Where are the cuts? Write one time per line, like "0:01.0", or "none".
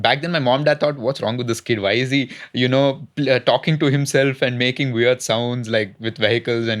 none